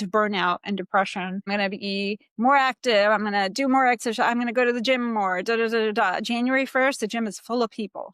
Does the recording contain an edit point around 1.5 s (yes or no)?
yes